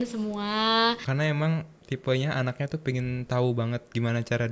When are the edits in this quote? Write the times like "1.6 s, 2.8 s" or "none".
1.1 s